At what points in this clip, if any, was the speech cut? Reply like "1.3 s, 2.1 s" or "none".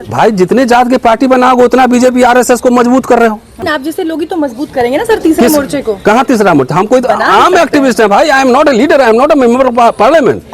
3.7 s